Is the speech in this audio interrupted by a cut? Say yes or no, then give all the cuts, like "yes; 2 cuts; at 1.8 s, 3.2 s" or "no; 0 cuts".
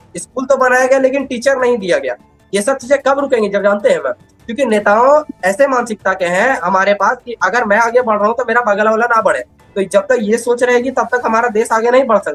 no; 0 cuts